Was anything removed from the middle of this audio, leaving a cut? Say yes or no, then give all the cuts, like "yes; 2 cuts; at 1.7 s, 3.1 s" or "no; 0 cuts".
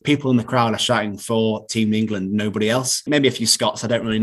yes; 1 cut; at 3.1 s